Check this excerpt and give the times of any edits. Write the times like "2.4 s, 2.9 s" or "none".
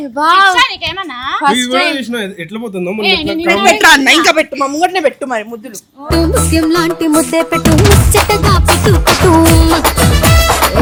none